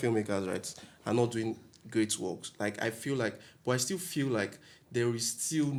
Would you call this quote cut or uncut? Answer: uncut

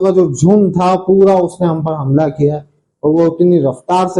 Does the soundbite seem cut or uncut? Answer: uncut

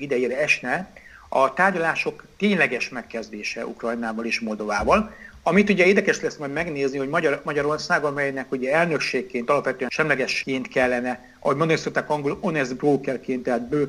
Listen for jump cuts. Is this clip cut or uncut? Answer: uncut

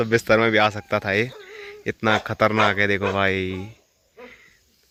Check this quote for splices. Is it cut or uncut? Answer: uncut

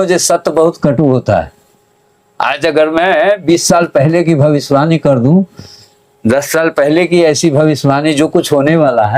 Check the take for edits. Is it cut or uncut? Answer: uncut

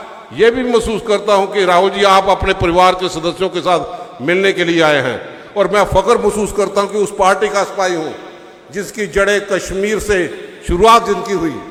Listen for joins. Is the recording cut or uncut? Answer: uncut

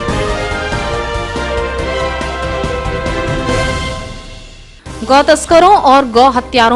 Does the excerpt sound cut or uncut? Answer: uncut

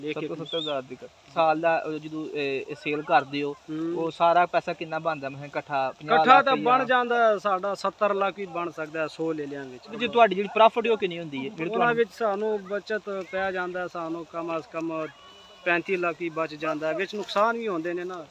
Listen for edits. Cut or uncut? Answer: cut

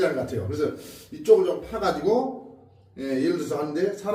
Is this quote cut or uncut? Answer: uncut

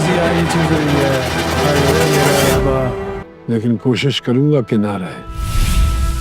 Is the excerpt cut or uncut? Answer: cut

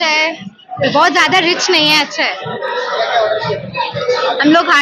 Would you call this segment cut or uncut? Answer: uncut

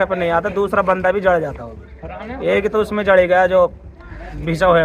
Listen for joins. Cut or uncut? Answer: uncut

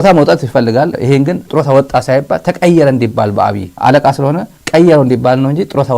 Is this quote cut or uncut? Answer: cut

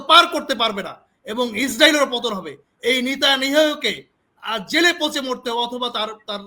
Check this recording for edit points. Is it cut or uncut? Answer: uncut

